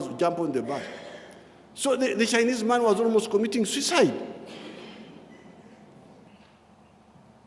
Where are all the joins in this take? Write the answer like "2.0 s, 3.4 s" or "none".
6.3 s